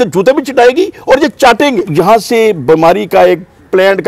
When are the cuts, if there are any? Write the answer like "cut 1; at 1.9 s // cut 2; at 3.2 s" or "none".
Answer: cut 1; at 1.8 s